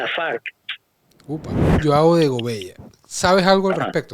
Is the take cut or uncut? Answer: cut